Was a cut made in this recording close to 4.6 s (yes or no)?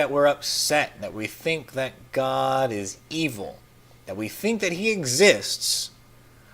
yes